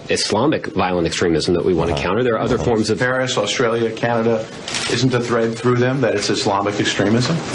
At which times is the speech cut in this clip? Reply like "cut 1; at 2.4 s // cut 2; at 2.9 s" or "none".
cut 1; at 3.5 s